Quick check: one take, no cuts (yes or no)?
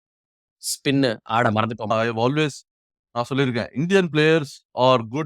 no